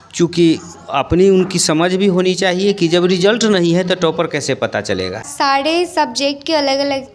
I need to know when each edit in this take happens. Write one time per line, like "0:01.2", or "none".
0:05.3